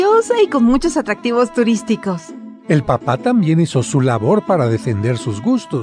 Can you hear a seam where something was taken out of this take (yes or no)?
no